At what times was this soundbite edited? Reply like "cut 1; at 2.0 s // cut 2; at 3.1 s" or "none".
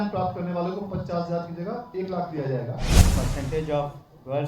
cut 1; at 3.0 s